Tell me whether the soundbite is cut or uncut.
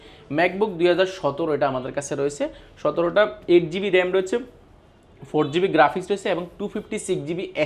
uncut